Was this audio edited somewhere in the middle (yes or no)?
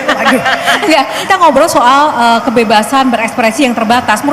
yes